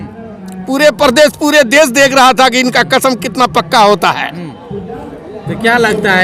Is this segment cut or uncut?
uncut